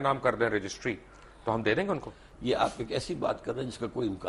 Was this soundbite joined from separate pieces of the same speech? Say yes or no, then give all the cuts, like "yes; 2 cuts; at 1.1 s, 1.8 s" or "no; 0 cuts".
no; 0 cuts